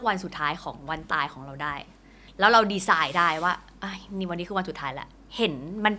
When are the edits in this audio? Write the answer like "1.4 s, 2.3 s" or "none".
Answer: none